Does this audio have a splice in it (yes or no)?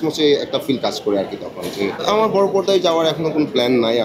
yes